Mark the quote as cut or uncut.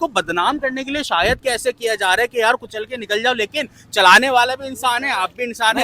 uncut